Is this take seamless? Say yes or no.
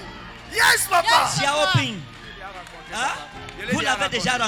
yes